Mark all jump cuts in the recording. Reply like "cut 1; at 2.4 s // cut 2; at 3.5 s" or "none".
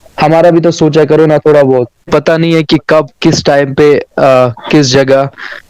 cut 1; at 2.1 s